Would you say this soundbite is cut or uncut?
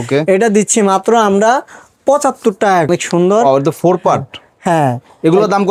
cut